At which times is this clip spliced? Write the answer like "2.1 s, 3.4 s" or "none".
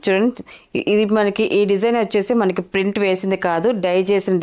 none